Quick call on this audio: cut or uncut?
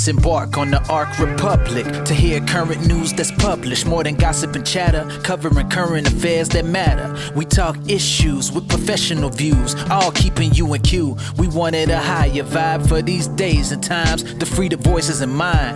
uncut